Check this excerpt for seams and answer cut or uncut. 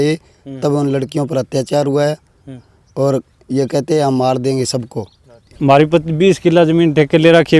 cut